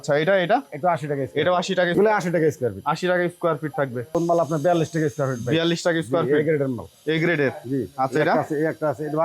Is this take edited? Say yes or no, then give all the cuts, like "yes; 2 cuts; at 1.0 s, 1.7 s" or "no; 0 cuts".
yes; 2 cuts; at 1.9 s, 4.2 s